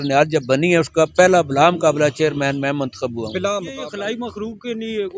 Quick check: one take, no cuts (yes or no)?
no